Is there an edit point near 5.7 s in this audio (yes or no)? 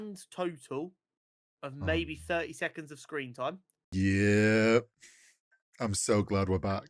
no